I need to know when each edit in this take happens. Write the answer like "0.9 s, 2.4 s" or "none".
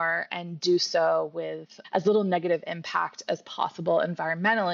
none